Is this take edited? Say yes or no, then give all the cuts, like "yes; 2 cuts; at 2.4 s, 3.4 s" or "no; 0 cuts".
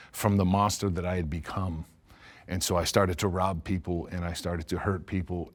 no; 0 cuts